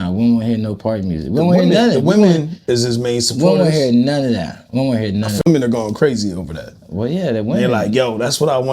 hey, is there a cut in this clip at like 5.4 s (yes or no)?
yes